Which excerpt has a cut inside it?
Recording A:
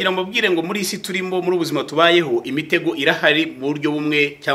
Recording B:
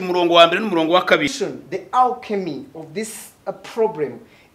B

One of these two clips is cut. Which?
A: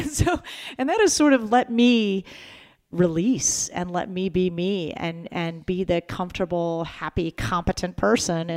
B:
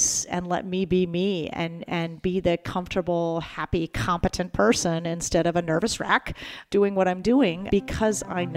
B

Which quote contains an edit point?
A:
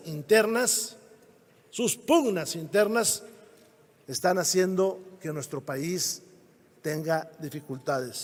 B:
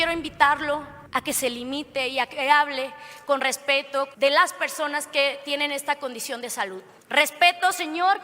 B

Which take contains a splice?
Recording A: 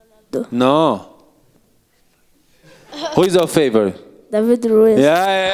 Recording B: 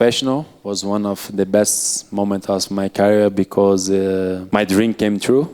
B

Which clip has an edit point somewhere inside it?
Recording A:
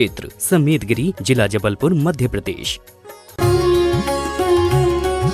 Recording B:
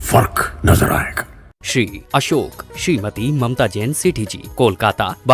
A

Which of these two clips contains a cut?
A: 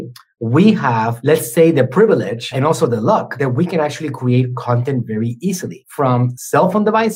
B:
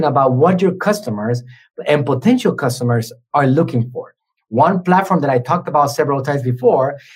A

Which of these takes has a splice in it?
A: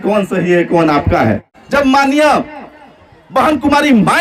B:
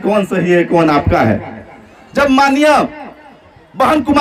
A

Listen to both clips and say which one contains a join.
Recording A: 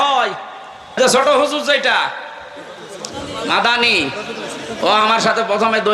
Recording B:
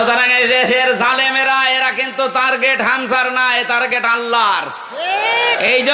A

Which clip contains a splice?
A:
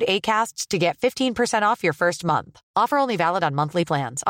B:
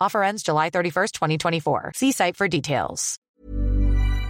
B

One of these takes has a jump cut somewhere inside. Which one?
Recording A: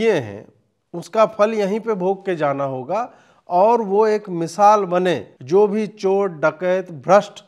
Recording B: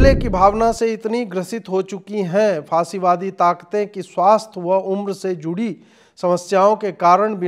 A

